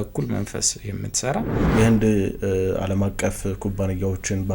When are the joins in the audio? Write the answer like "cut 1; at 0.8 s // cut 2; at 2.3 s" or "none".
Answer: cut 1; at 1.6 s